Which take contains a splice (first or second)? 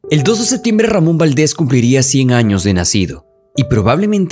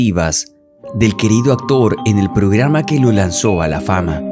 first